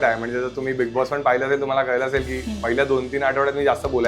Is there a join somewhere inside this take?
no; 0 cuts

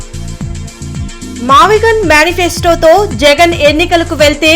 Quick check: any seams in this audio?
yes; 1 cut; at 1.2 s

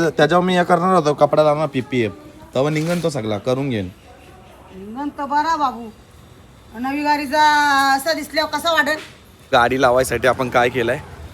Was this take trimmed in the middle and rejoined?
yes; 1 cut; at 9.5 s

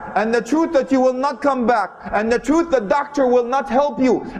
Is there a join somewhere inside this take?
no; 0 cuts

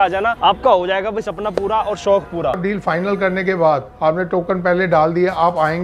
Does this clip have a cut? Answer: yes; 1 cut; at 2.6 s

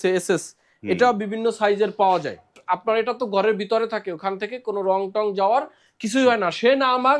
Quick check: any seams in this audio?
yes; 1 cut; at 2.6 s

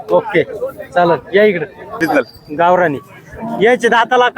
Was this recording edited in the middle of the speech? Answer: yes; 1 cut; at 2.1 s

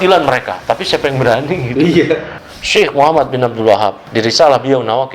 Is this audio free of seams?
no; 2 cuts; at 2.4 s, 4.0 s

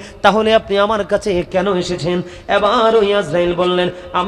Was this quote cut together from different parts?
yes; 1 cut; at 1.7 s

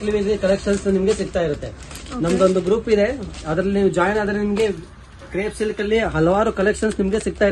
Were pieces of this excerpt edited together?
no; 0 cuts

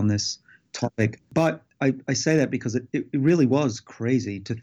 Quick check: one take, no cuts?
no; 1 cut; at 1.7 s

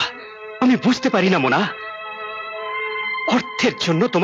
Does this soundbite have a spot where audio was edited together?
no; 0 cuts

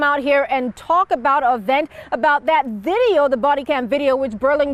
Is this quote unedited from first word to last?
yes; 0 cuts

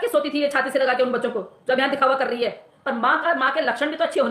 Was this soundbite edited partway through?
yes; 1 cut; at 2.7 s

